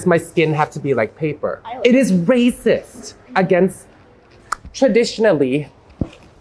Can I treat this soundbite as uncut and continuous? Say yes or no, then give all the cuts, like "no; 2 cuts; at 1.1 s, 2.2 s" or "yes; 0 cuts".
no; 1 cut; at 1.7 s